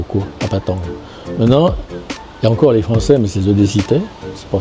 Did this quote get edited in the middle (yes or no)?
no